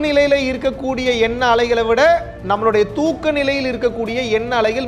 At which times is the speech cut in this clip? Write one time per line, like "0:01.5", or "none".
0:02.3